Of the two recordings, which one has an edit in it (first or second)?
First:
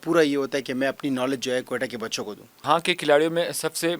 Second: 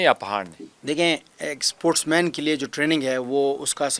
first